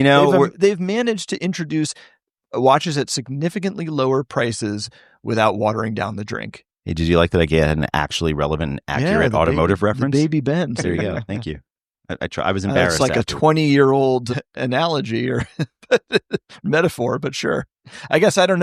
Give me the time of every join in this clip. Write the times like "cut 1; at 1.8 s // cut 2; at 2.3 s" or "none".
none